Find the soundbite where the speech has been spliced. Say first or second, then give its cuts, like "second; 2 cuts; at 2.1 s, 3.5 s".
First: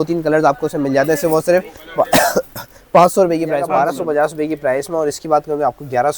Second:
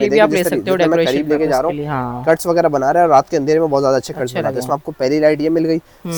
first; 1 cut; at 3.7 s